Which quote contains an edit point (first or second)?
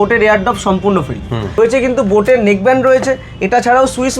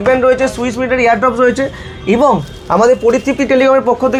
first